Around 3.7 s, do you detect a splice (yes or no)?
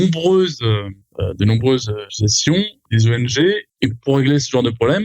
yes